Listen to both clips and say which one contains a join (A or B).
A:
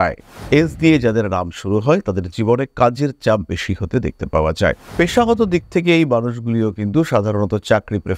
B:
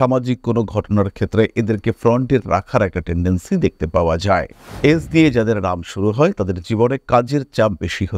A